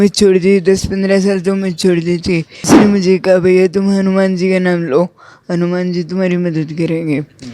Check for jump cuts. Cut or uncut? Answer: cut